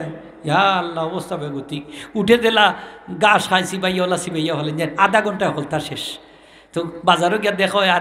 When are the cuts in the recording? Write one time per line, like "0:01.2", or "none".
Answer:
none